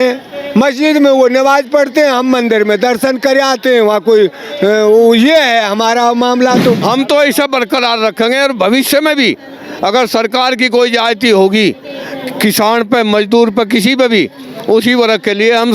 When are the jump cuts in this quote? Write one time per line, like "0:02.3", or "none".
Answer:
0:06.8